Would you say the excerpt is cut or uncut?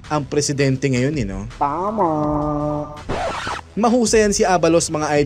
cut